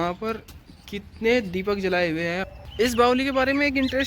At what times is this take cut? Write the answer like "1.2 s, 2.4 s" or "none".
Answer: 2.5 s